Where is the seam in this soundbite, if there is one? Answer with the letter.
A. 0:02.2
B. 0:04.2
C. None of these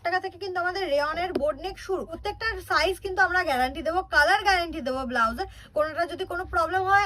A